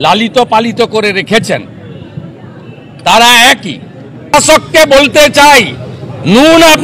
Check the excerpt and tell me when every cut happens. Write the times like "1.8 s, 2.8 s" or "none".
4.3 s